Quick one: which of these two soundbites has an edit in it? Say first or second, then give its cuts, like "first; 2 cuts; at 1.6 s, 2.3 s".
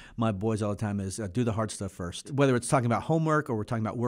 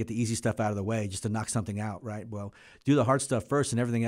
first; 1 cut; at 2.3 s